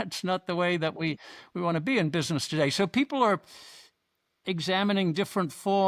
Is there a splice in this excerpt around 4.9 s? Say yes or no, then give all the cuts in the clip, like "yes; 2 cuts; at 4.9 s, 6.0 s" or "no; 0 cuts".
no; 0 cuts